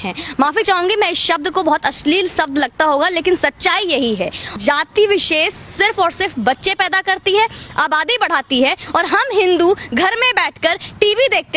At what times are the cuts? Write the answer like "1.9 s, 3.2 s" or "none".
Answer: 4.6 s